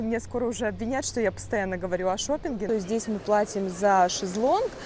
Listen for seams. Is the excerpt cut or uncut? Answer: cut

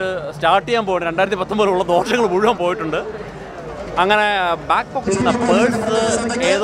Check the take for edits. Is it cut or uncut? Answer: uncut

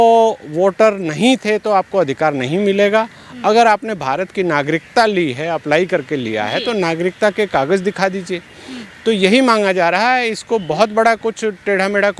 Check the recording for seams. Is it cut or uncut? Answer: uncut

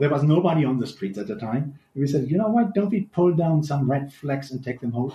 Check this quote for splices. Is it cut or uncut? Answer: uncut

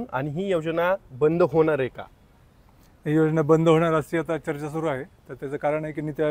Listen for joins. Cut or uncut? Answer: uncut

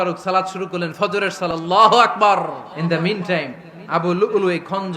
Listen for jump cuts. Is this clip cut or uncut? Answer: cut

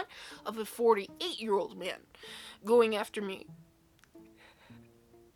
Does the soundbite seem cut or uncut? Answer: uncut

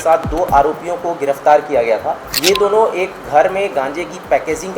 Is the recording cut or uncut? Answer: cut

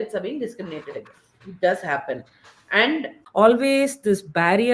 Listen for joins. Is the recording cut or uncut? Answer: cut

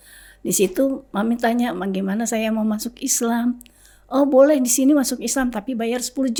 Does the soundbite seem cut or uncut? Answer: uncut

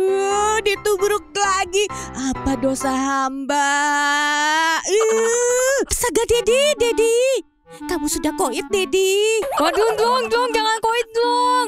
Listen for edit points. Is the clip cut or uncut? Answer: cut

